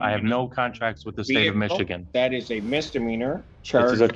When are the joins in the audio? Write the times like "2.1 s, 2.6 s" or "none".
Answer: none